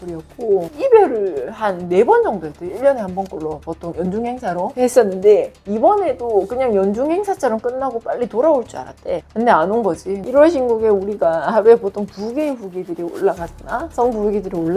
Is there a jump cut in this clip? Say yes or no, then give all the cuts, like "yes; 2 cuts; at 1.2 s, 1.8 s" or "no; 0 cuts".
yes; 1 cut; at 10.2 s